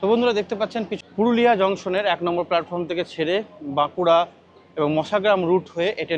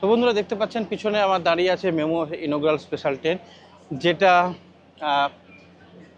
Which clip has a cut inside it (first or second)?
first